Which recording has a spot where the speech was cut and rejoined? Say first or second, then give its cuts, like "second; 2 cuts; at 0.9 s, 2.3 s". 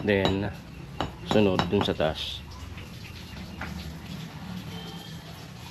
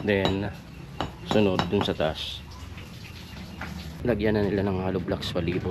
second; 1 cut; at 4.0 s